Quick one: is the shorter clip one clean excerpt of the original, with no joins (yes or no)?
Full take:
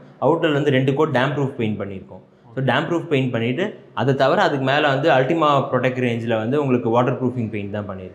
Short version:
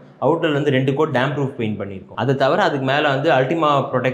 no